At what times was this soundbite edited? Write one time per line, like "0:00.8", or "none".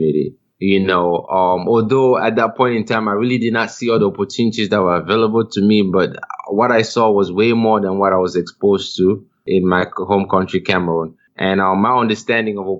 0:11.2